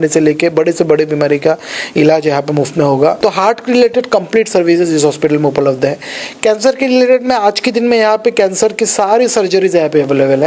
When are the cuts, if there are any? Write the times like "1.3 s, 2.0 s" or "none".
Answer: 3.2 s